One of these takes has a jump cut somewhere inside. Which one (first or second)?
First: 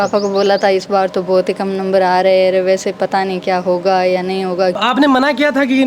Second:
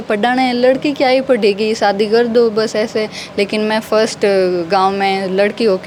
first